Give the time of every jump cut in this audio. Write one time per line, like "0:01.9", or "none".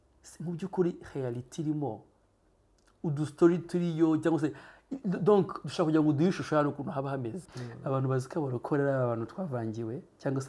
0:07.5